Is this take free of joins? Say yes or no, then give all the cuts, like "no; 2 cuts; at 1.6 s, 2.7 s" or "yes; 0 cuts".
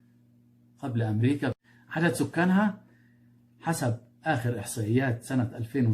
no; 1 cut; at 1.6 s